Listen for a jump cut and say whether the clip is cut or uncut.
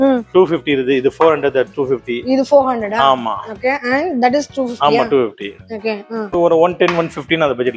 cut